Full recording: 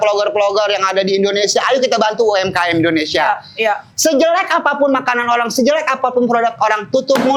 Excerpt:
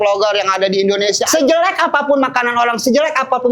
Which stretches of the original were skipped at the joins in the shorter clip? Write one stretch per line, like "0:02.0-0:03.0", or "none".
0:01.6-0:03.9